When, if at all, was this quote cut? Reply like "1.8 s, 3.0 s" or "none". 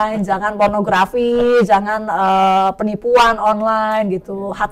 none

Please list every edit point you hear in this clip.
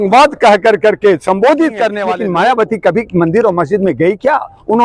2.0 s

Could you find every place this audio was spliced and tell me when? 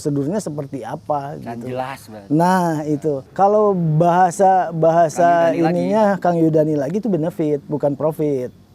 3.2 s

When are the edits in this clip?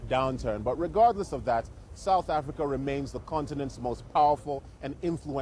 2.2 s

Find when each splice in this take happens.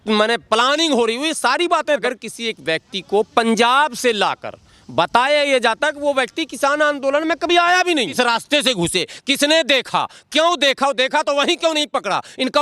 1.9 s, 8.1 s

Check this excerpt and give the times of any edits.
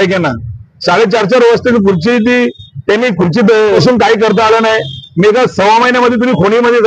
3.8 s

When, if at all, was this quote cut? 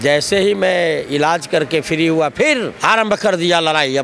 2.7 s

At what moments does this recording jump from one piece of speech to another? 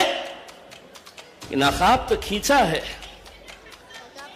none

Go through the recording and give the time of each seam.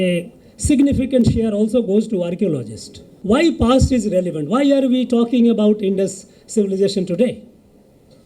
3.1 s

